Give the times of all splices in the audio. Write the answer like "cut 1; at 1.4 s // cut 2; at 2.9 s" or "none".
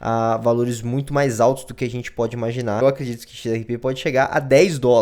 cut 1; at 2.8 s